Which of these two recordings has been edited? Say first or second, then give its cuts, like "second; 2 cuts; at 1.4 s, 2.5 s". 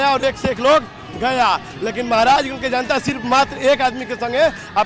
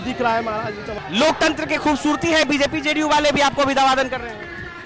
second; 1 cut; at 0.9 s